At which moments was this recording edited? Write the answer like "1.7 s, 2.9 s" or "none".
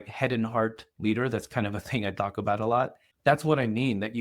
3.0 s